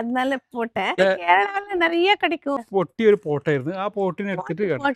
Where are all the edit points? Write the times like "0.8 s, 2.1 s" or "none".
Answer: 1.0 s, 2.6 s